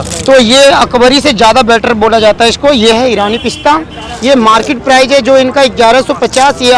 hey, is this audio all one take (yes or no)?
yes